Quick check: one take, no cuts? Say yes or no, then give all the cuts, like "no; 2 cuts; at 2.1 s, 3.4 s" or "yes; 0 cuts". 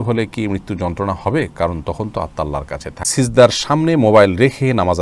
no; 1 cut; at 3.1 s